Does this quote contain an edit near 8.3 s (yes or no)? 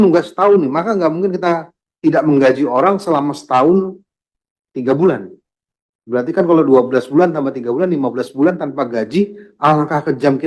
no